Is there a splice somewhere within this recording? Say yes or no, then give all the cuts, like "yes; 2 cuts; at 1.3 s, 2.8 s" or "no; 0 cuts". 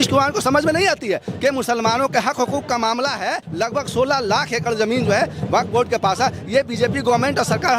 yes; 1 cut; at 3.5 s